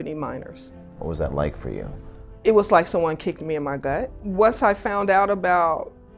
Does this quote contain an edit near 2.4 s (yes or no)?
no